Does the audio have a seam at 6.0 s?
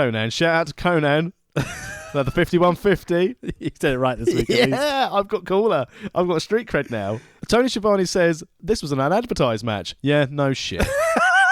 no; 1 cut; at 7.4 s

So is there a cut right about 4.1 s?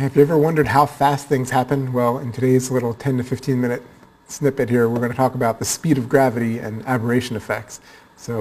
no; 1 cut; at 1.7 s

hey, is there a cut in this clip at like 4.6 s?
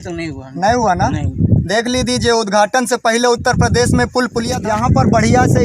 yes; 1 cut; at 4.6 s

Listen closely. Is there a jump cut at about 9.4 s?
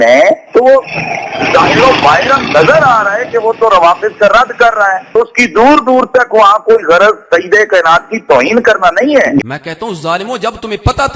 yes; 1 cut; at 9.4 s

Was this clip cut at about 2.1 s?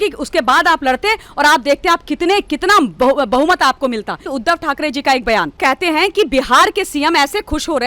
no; 2 cuts; at 4.3 s, 5.6 s

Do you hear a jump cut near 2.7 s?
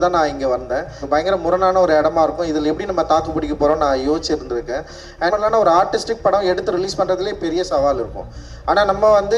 no; 2 cuts; at 1.0 s, 5.3 s

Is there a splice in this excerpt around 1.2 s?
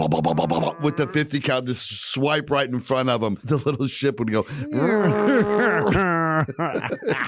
no; 1 cut; at 3.4 s

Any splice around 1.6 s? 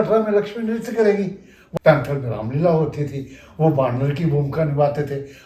yes; 1 cut; at 1.6 s

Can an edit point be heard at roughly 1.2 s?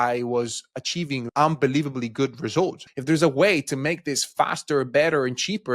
yes; 2 cuts; at 1.2 s, 2.9 s

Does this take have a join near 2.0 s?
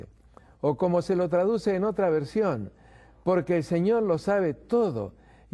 yes; 1 cut; at 2.0 s

